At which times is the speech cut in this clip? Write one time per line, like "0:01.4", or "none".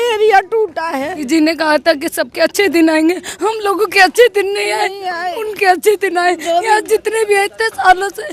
0:01.2